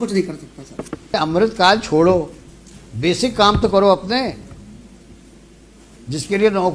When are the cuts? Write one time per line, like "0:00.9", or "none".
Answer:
0:01.2